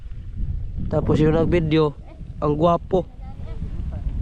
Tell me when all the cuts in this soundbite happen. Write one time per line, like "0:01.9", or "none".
none